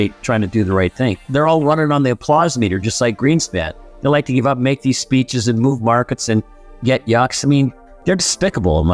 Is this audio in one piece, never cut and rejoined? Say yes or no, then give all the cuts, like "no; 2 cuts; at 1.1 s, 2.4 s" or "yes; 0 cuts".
no; 2 cuts; at 1.3 s, 7.9 s